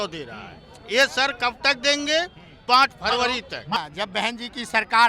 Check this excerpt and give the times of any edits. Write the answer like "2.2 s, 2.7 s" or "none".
3.8 s

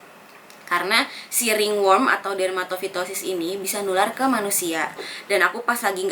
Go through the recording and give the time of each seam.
5.1 s

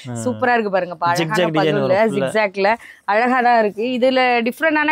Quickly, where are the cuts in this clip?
none

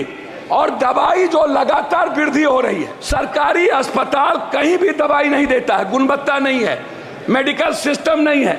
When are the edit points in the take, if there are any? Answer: 3.0 s

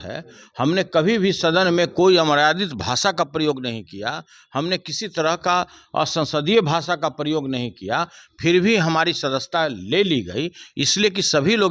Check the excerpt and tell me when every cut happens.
none

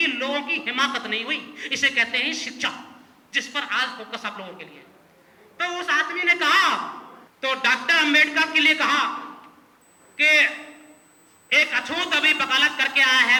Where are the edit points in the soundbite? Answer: none

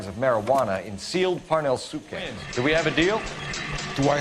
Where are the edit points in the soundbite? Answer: 2.4 s

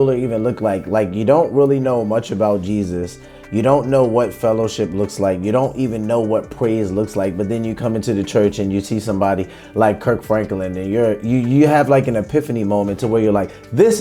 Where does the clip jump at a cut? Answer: none

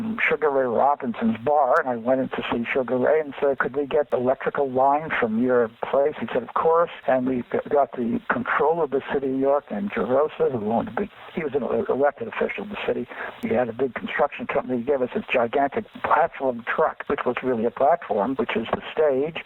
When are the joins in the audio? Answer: 4.1 s, 15.9 s

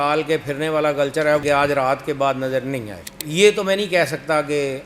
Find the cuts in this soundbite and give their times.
1.4 s, 3.2 s

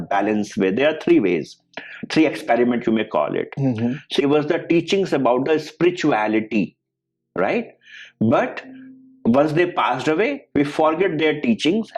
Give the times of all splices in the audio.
4.2 s

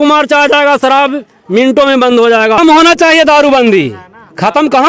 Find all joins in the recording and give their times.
2.6 s

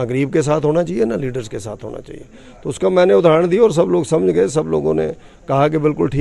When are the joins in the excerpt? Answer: none

